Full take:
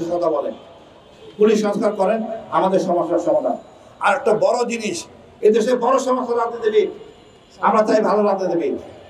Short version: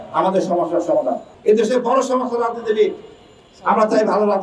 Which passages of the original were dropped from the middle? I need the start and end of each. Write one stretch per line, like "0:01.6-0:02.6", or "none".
0:03.7-0:05.3